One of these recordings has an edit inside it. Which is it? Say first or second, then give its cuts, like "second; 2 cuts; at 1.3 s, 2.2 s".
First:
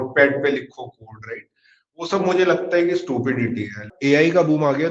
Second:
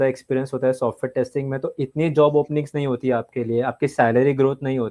first; 1 cut; at 3.9 s